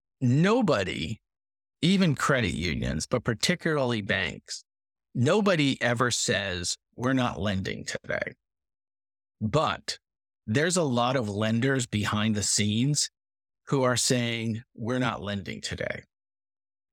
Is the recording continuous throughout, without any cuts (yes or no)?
yes